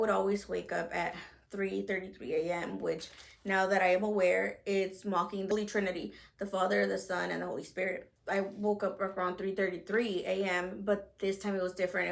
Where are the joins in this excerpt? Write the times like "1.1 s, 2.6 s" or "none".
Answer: 5.5 s, 8.1 s